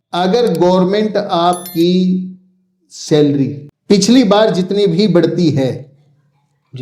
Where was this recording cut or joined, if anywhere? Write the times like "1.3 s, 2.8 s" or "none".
3.7 s